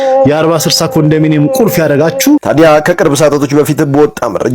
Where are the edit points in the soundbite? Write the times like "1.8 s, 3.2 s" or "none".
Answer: 2.5 s